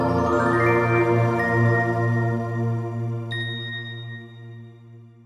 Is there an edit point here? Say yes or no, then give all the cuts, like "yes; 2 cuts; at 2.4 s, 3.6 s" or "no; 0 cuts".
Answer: no; 0 cuts